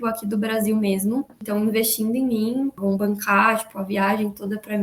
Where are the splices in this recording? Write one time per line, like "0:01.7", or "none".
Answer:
0:01.4
0:02.8